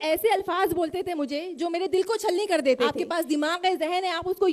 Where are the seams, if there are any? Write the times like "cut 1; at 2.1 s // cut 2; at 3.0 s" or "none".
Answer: cut 1; at 3.0 s